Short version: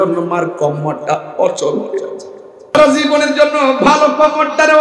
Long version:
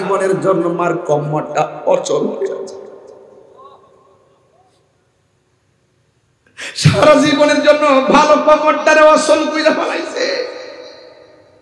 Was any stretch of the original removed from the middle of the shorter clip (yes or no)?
yes